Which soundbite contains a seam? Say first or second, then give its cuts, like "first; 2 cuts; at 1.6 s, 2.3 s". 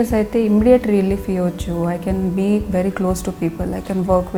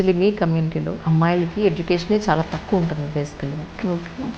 second; 1 cut; at 1.0 s